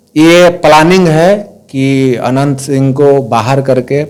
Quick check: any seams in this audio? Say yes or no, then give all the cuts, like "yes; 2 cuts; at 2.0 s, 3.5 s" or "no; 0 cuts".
no; 0 cuts